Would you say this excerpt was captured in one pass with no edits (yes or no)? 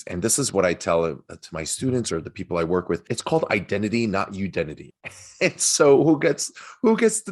no